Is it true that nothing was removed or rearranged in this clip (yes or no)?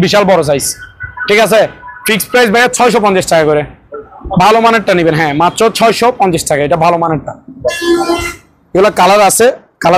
yes